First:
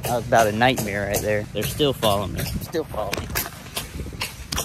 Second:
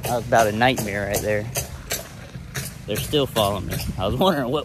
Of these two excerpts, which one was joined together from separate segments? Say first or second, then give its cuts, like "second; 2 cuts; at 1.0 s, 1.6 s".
first; 2 cuts; at 1.5 s, 2.6 s